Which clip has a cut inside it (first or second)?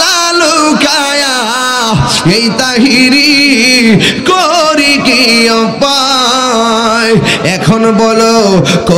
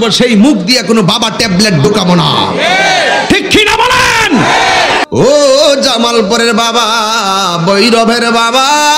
second